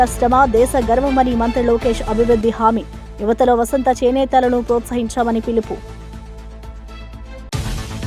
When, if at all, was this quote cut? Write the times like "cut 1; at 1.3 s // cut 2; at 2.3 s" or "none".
none